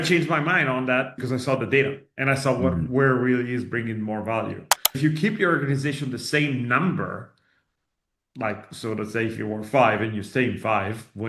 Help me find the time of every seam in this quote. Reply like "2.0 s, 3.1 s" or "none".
1.1 s, 5.0 s